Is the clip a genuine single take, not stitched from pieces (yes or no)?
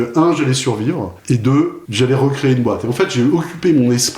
no